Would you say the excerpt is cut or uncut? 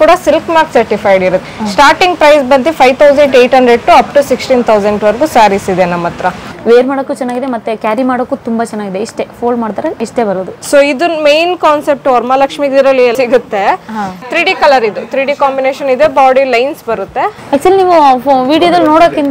cut